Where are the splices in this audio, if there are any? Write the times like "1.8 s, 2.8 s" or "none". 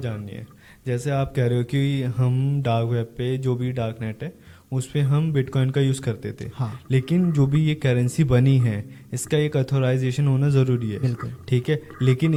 none